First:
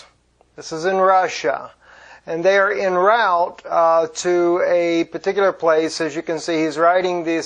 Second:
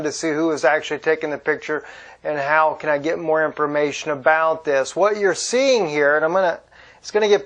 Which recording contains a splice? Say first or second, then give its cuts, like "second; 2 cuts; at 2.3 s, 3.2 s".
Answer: second; 1 cut; at 0.9 s